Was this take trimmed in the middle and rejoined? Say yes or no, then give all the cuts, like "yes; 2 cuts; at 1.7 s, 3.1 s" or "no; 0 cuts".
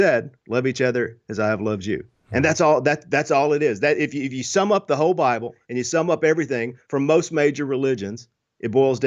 no; 0 cuts